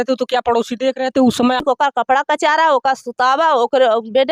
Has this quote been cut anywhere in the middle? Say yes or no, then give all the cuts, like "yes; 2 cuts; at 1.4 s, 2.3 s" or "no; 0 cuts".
yes; 1 cut; at 1.6 s